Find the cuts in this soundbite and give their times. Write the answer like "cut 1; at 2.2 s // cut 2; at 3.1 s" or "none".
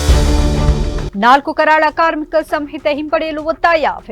none